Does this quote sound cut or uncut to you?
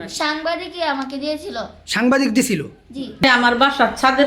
cut